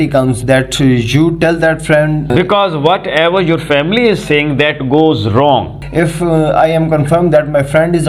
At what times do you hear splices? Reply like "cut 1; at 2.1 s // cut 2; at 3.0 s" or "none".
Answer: cut 1; at 2.2 s // cut 2; at 5.8 s